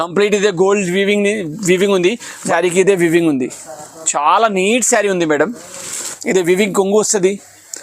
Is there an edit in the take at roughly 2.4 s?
yes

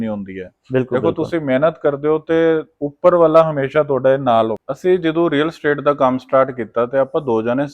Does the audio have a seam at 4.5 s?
yes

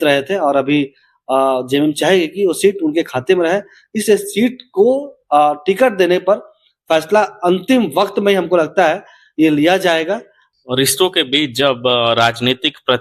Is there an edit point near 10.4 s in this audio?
yes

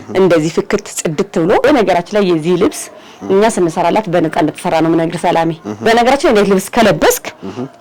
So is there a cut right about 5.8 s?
yes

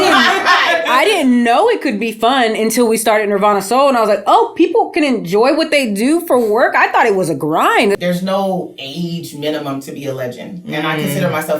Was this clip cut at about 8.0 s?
yes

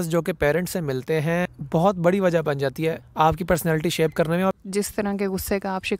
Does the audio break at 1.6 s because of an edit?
yes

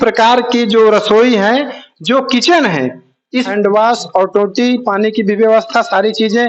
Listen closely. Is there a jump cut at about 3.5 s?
yes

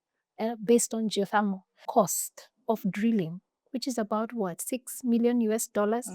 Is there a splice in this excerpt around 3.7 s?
no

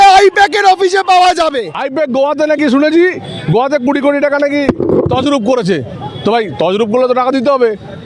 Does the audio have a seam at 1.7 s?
yes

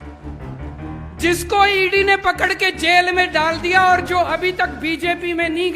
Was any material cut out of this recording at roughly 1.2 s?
yes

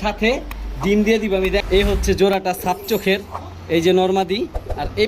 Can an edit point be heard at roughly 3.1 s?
no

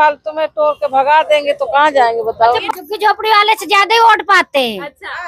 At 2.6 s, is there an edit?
yes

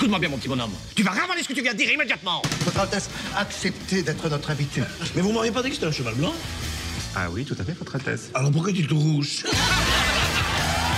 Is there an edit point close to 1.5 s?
no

